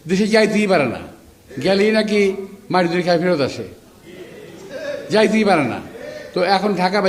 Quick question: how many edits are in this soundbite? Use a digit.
0